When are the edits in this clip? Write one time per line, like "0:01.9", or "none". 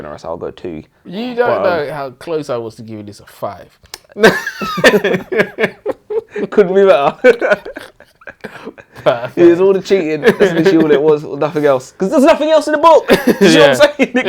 0:01.1